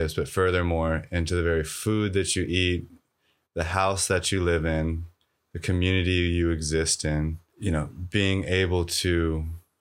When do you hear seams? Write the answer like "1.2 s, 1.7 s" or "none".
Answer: 7.5 s